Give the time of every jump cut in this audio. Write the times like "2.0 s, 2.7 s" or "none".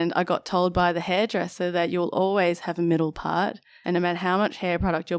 3.7 s